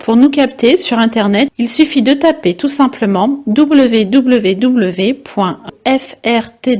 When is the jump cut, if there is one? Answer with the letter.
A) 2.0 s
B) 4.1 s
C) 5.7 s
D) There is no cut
C